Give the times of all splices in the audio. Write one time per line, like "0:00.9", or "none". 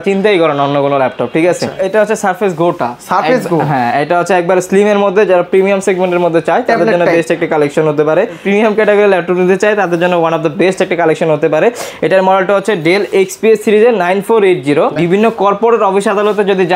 0:01.8
0:08.4
0:15.0